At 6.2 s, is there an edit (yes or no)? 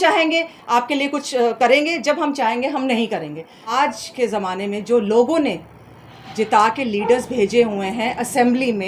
no